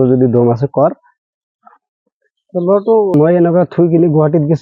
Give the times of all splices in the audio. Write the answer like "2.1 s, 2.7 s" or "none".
3.1 s